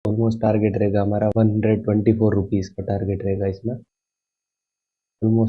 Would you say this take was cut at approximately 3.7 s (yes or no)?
no